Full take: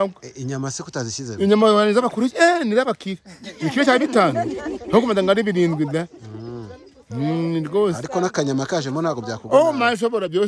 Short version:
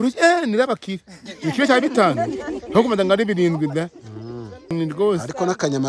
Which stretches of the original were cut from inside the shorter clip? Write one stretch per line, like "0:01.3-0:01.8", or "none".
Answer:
0:06.9-0:07.5